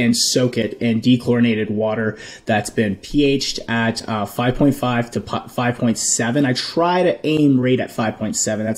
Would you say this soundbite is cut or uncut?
uncut